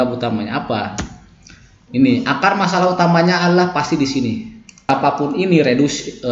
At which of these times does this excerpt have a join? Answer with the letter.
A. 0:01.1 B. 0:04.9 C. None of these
B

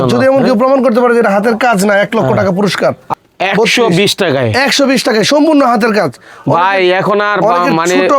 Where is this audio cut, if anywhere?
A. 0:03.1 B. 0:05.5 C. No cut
A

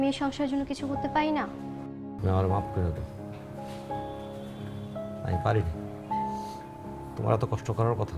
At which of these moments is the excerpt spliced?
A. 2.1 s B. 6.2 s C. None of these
A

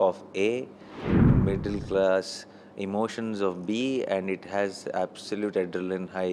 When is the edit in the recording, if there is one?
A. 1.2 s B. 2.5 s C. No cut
A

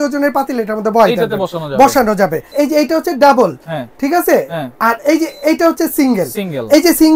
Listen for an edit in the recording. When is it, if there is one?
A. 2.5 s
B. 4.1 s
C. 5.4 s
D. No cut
A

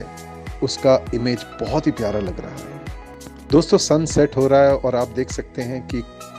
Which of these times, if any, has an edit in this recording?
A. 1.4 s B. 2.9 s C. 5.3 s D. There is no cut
B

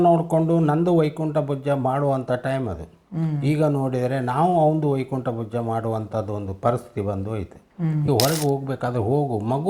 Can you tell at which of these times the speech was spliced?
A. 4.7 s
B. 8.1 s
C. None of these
B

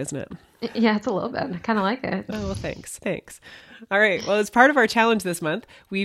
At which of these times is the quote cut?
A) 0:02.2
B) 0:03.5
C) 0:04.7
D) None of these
D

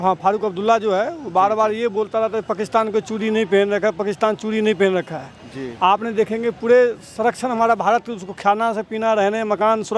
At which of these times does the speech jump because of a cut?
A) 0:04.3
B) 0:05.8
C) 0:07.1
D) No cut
D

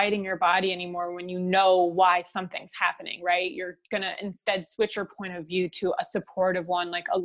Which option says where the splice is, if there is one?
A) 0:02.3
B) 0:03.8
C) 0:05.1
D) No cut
D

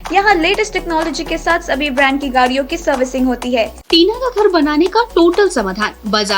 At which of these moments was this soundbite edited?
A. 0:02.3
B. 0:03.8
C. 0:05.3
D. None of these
B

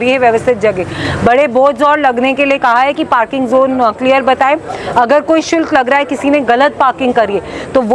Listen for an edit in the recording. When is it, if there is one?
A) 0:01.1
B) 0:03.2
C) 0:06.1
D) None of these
D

